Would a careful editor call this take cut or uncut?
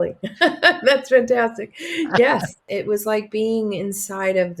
cut